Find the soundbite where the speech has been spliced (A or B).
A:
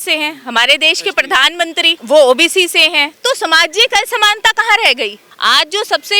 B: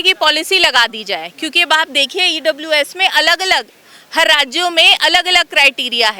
A